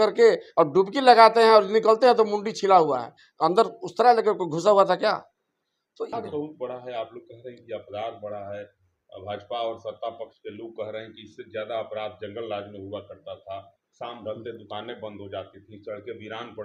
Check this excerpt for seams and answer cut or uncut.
uncut